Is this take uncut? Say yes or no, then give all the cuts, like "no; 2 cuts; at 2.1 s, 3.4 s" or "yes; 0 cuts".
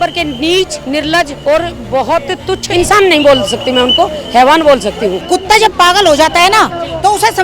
no; 3 cuts; at 1.1 s, 2.6 s, 5.2 s